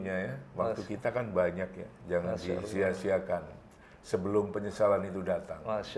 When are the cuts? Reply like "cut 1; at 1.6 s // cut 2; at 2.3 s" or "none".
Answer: none